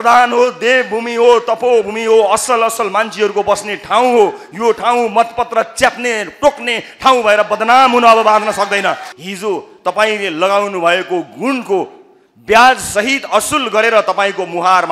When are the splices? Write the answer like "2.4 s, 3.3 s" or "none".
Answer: 9.1 s